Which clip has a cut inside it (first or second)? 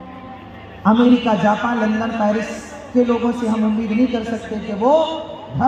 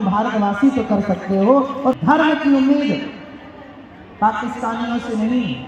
second